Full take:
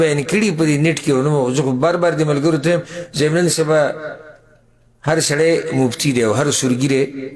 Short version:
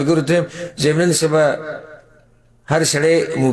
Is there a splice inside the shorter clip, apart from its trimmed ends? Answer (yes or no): no